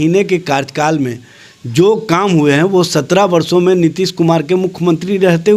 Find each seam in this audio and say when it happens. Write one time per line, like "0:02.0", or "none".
none